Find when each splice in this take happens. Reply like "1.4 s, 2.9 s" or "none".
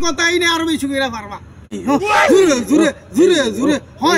1.8 s